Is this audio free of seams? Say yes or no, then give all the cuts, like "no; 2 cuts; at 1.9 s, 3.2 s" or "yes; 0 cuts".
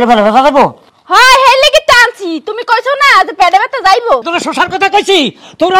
no; 1 cut; at 4.3 s